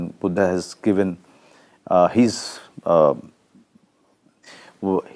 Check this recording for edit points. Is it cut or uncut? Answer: uncut